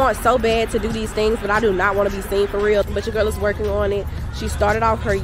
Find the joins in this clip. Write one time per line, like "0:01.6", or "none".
0:02.8